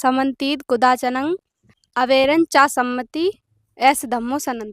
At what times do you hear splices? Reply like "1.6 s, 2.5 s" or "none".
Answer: 1.8 s